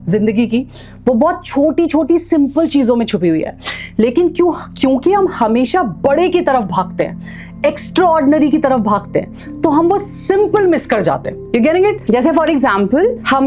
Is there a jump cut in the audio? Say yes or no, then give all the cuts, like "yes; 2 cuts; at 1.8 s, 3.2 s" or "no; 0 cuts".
no; 0 cuts